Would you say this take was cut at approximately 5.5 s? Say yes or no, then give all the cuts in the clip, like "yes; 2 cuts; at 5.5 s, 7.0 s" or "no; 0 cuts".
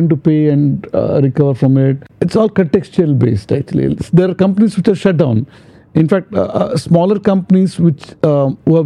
no; 1 cut; at 2.0 s